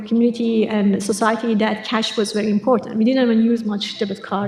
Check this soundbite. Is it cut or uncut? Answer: uncut